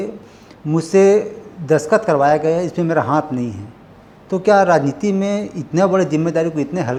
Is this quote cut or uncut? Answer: uncut